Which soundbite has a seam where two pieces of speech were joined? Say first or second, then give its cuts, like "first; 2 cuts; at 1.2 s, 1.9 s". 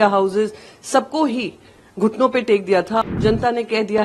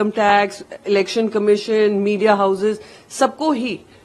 first; 1 cut; at 3.1 s